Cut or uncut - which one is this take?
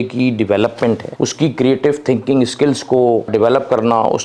cut